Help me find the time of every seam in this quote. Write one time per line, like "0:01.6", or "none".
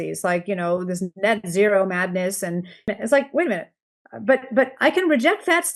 0:02.9